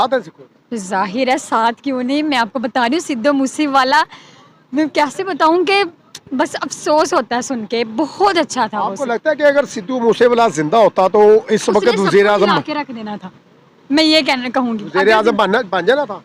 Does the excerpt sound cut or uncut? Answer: uncut